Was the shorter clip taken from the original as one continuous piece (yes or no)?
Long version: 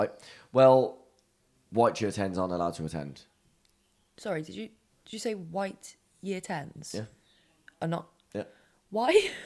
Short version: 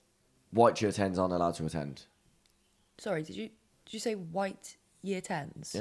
yes